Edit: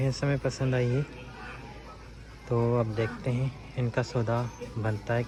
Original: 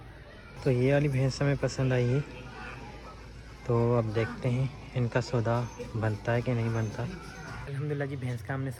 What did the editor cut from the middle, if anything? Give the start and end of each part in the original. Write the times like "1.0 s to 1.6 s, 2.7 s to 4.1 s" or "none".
none